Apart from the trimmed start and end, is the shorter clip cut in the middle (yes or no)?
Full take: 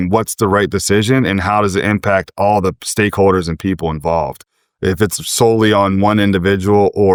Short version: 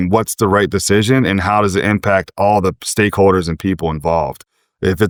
no